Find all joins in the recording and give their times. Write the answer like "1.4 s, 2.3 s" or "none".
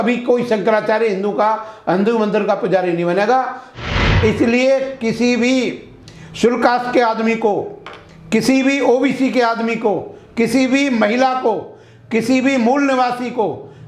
3.8 s